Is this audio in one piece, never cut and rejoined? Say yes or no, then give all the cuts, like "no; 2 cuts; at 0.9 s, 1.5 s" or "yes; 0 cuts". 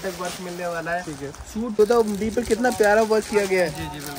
no; 1 cut; at 1.8 s